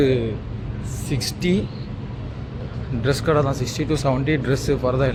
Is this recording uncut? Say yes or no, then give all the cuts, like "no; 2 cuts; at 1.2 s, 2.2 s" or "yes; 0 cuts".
yes; 0 cuts